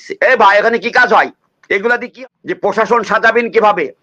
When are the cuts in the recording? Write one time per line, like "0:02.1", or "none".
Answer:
0:02.1

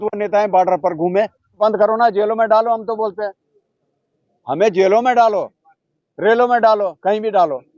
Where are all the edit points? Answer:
0:01.5

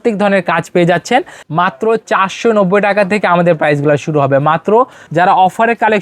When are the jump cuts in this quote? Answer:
0:01.4
0:05.0

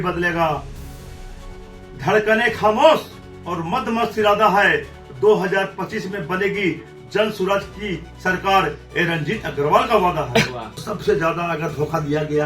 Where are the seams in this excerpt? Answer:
0:10.8

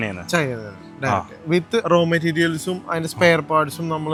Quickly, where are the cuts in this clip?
none

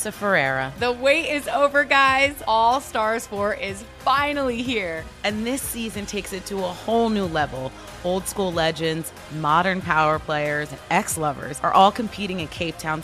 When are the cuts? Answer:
none

